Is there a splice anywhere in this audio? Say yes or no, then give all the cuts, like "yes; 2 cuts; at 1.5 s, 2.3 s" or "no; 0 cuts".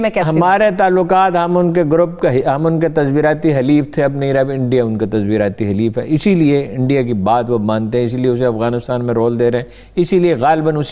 no; 0 cuts